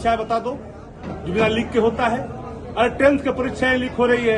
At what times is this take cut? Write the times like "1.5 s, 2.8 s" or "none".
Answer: none